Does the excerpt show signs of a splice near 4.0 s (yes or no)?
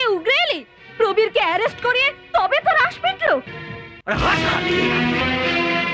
yes